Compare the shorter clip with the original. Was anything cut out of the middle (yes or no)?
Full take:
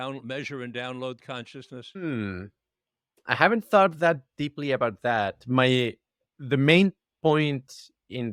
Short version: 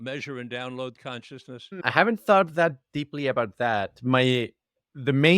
yes